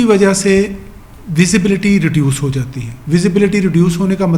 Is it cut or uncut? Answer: uncut